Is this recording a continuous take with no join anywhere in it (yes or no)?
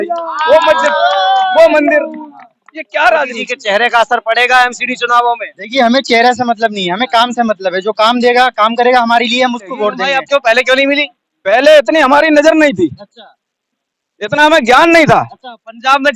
no